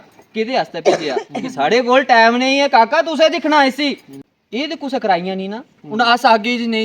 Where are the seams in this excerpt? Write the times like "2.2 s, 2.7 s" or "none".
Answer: 4.1 s